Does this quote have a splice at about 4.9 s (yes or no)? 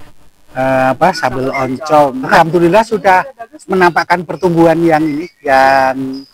no